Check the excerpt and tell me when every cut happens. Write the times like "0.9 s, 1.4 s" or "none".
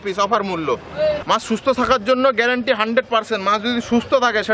1.2 s